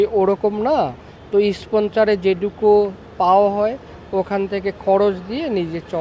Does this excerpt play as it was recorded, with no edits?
yes; 0 cuts

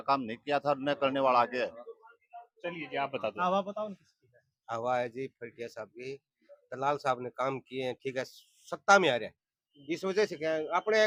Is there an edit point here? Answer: no; 0 cuts

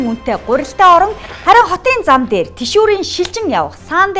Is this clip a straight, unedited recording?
no; 1 cut; at 1.3 s

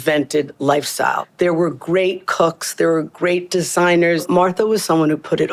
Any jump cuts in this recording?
yes; 2 cuts; at 1.3 s, 4.2 s

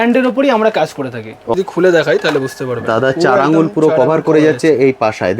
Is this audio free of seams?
no; 1 cut; at 1.6 s

